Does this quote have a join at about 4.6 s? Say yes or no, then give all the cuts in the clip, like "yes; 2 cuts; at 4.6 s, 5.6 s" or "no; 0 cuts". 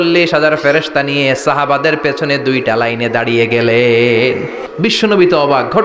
yes; 1 cut; at 4.6 s